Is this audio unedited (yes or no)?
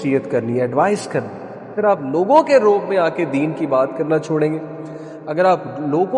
no